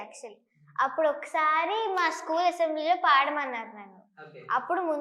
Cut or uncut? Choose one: uncut